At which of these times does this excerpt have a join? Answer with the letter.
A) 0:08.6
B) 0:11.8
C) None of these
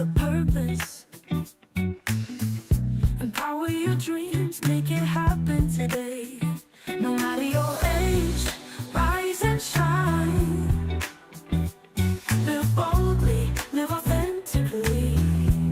B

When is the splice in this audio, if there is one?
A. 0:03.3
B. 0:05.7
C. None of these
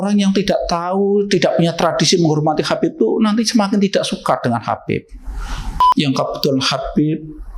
B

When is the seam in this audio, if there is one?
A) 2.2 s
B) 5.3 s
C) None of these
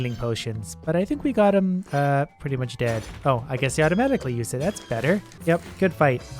B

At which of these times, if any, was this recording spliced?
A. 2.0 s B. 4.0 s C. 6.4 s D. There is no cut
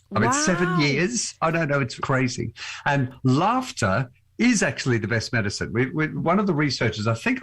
A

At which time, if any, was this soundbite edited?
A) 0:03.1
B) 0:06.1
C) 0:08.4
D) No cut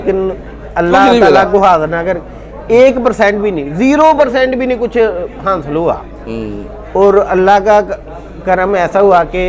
D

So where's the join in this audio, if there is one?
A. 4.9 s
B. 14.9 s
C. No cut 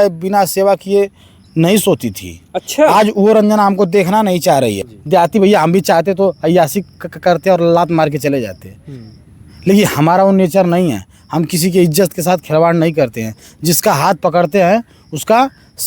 A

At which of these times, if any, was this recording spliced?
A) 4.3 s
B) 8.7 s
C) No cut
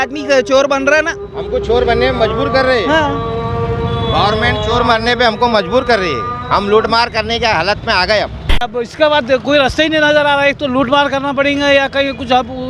B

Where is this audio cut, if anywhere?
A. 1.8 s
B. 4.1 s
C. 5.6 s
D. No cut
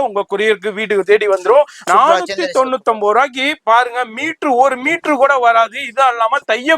A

